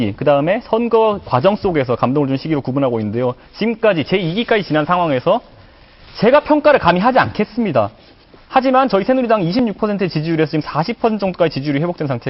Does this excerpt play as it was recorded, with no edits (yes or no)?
yes